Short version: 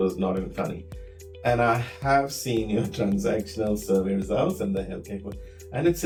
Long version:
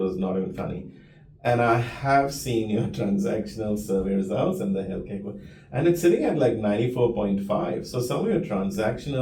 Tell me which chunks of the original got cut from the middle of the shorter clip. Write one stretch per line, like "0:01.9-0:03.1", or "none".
none